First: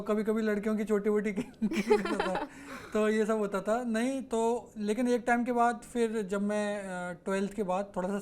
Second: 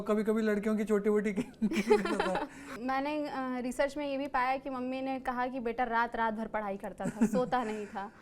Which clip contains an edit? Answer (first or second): second